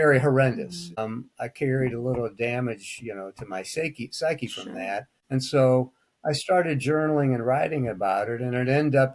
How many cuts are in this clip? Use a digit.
2